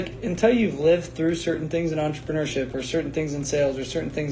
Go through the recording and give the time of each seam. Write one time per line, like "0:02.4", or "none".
none